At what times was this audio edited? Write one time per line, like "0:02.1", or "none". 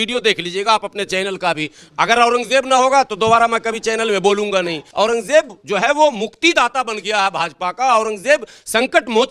0:04.8